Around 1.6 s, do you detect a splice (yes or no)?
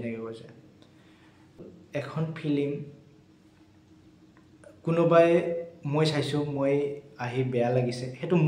yes